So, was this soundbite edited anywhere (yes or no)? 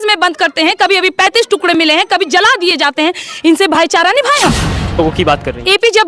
yes